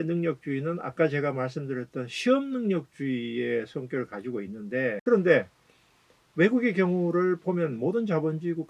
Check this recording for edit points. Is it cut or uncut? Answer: cut